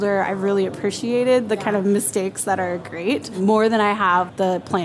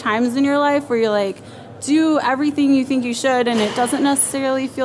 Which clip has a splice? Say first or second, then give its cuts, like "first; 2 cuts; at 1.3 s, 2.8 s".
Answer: first; 1 cut; at 3.4 s